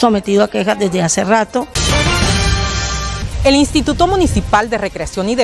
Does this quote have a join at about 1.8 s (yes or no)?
yes